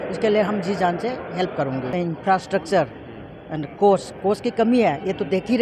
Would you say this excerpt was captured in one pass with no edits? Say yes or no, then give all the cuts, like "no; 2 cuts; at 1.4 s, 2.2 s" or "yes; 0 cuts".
no; 1 cut; at 1.9 s